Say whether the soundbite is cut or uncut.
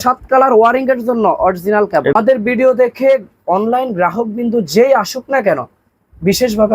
cut